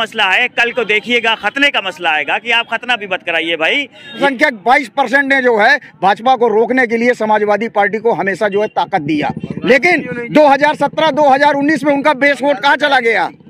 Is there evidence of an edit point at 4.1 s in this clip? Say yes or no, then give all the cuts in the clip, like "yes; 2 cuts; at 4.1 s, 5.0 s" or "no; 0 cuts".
yes; 1 cut; at 4.1 s